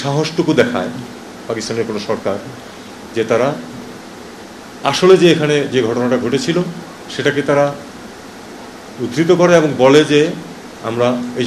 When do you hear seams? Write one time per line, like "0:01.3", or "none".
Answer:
none